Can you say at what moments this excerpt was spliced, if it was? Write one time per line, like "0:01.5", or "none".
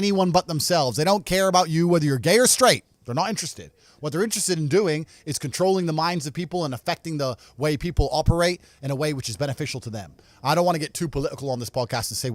none